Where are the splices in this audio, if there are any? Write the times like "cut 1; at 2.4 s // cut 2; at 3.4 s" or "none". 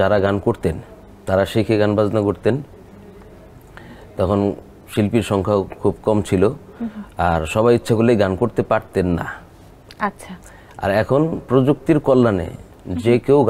none